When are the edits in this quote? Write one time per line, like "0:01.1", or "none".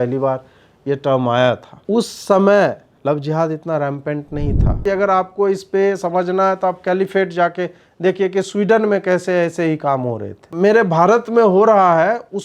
0:01.7
0:02.9
0:04.8
0:10.5

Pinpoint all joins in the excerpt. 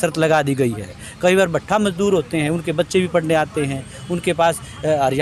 none

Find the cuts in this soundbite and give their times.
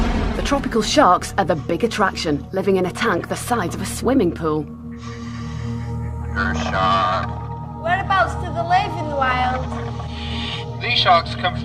none

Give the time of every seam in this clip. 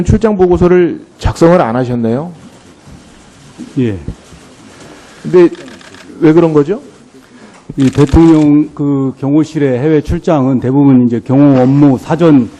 0:04.3

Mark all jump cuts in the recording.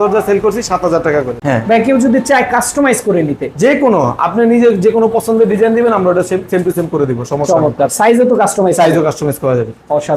0:01.4

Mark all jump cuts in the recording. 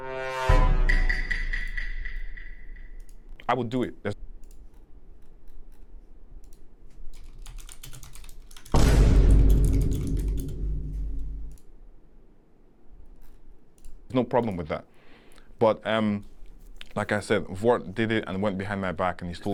none

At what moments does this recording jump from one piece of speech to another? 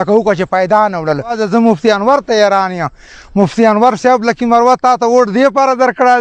0:01.4

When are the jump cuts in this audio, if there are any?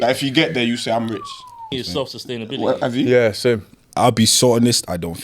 0:01.7

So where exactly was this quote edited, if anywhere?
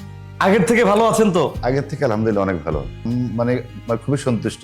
0:03.0

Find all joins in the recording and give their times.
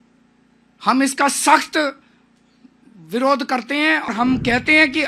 0:04.1

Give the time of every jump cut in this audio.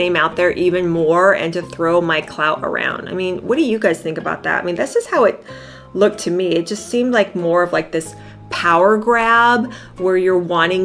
none

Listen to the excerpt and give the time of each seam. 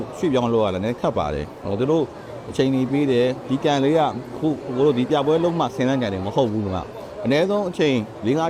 none

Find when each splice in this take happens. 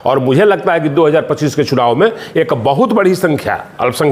none

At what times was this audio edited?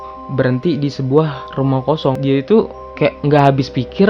0:02.2

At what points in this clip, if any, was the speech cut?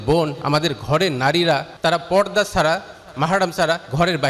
0:01.7

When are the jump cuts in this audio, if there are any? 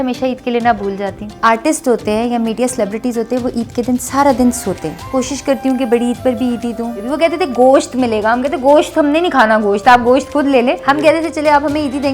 0:01.3
0:05.1
0:07.0
0:10.8

